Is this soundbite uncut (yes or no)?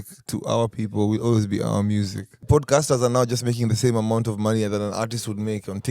no